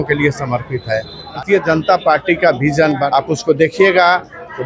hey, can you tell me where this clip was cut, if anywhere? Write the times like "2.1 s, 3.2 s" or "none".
1.4 s, 3.1 s